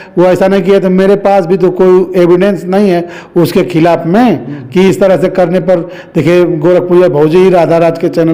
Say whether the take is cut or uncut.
uncut